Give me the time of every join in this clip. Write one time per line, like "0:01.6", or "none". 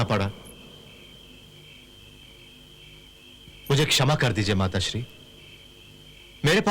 none